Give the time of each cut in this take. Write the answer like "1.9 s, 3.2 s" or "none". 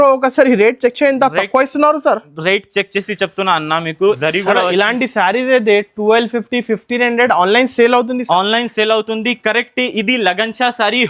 4.2 s